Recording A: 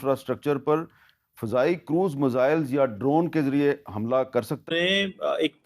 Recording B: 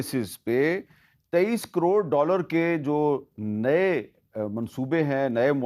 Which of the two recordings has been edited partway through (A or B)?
A